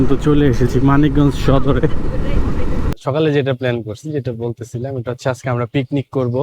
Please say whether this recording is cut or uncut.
cut